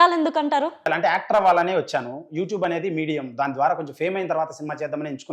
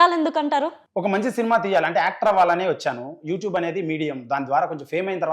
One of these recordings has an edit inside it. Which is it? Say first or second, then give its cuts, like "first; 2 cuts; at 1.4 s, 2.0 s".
first; 1 cut; at 0.9 s